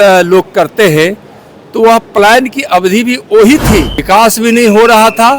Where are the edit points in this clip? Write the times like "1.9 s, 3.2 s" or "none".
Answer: 4.0 s